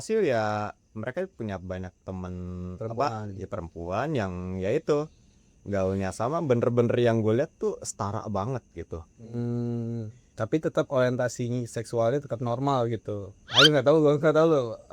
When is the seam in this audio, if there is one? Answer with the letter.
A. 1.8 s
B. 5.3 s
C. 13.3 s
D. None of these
C